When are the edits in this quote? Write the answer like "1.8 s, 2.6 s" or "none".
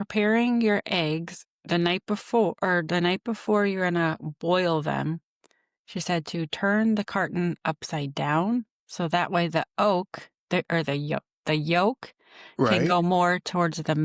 none